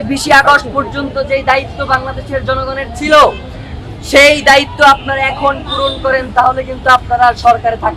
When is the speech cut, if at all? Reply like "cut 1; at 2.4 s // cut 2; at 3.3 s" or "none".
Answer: none